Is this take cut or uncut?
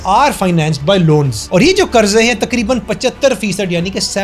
uncut